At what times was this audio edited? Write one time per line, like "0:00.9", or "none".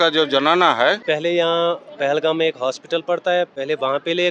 0:01.0